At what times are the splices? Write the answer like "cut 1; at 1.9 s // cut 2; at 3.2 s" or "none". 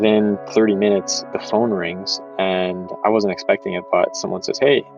none